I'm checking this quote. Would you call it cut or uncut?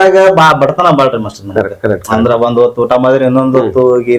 uncut